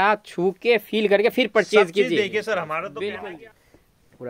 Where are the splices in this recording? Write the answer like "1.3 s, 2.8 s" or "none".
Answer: 3.3 s